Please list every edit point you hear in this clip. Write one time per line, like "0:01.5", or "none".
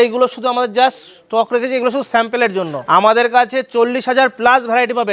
0:02.8

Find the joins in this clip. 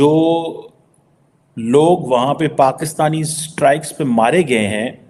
none

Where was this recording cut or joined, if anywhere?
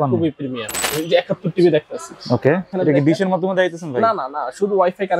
0:00.9
0:02.7

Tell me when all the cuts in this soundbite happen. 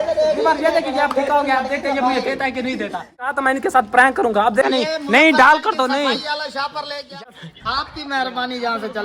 0:03.3
0:04.7
0:07.2

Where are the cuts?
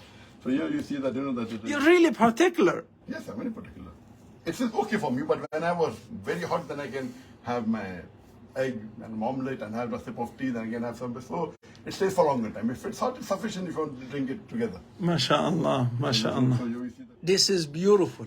0:16.9

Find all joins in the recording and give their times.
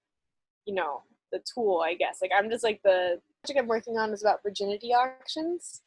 0:03.5

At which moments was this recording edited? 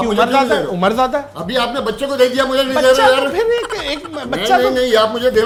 none

